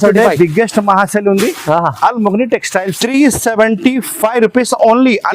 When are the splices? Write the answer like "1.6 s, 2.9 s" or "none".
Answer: 3.0 s